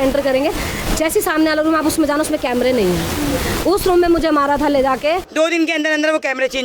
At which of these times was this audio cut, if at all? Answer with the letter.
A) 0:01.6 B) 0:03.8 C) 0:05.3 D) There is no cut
C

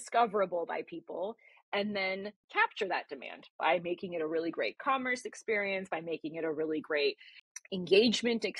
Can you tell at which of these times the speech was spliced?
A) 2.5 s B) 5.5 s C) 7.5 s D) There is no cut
A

